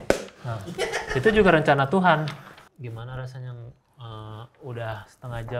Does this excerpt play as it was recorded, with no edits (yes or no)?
no